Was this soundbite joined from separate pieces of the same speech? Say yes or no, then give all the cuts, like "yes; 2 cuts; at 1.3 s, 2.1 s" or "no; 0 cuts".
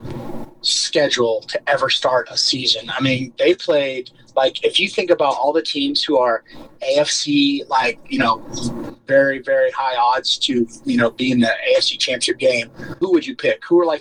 yes; 1 cut; at 13.0 s